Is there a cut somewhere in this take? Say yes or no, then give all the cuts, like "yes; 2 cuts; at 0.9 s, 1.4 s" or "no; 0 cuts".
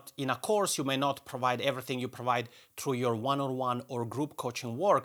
no; 0 cuts